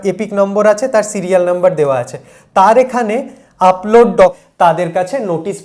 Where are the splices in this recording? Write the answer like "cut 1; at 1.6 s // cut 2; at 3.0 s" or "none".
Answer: cut 1; at 4.4 s